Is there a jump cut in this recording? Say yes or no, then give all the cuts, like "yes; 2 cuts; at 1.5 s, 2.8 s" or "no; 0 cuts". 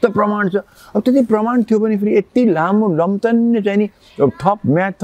no; 0 cuts